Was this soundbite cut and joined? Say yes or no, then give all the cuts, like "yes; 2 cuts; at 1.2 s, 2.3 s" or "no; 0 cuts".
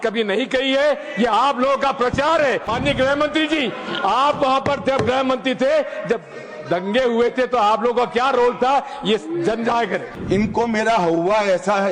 yes; 2 cuts; at 2.7 s, 10.1 s